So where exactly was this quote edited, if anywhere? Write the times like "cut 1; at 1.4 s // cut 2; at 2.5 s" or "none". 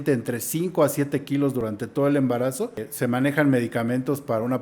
cut 1; at 2.8 s